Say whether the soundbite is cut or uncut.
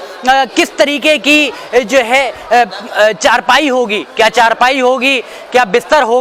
uncut